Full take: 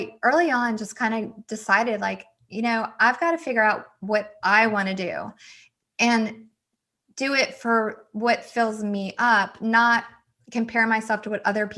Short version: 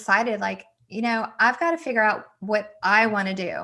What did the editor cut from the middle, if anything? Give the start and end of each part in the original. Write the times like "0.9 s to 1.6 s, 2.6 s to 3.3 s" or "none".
none